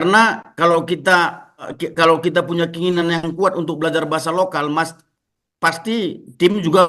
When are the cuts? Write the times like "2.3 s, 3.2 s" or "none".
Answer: 1.8 s